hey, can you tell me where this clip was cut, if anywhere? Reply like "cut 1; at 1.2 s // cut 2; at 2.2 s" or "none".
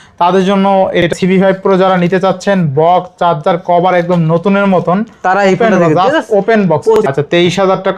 cut 1; at 1.1 s // cut 2; at 7.0 s